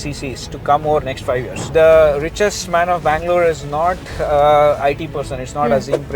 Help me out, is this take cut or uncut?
cut